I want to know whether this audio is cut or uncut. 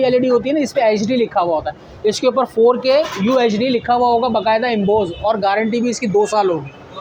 uncut